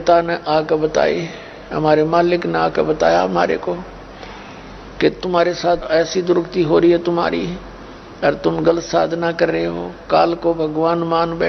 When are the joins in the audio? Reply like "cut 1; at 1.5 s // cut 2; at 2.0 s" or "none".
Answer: none